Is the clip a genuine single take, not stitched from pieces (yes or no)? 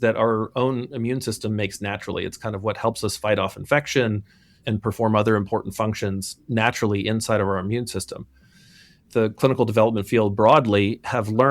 no